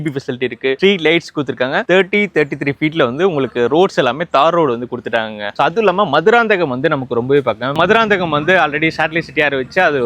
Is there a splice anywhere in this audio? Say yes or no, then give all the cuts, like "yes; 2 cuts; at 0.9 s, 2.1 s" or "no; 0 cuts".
yes; 2 cuts; at 5.5 s, 7.7 s